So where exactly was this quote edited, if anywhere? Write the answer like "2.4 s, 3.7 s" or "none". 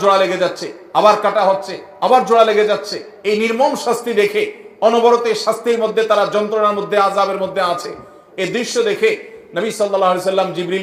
none